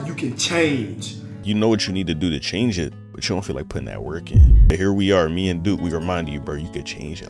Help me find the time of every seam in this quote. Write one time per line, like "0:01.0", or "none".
0:01.4
0:03.1
0:04.7